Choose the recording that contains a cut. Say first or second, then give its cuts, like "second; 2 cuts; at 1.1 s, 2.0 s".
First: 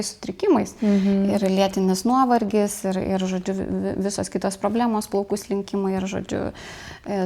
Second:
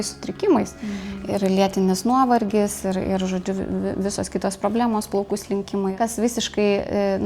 second; 1 cut; at 6.0 s